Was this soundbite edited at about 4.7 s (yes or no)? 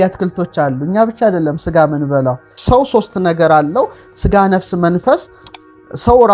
no